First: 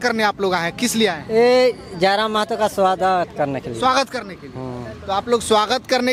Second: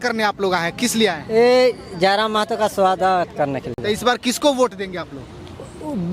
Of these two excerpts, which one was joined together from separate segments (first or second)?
second